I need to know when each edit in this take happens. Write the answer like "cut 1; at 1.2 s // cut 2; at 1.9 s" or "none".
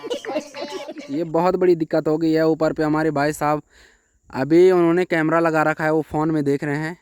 cut 1; at 0.9 s